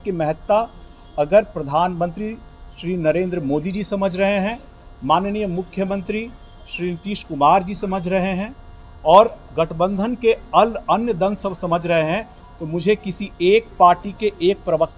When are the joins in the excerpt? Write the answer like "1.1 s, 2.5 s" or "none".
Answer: none

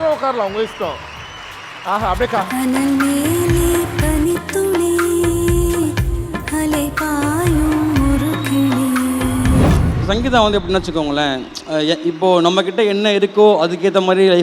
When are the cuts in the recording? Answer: 9.9 s

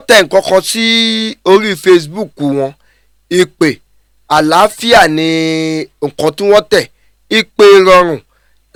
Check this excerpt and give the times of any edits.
none

